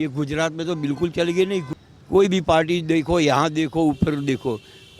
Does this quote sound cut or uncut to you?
cut